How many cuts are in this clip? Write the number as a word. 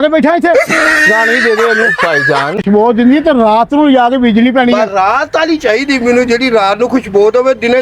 one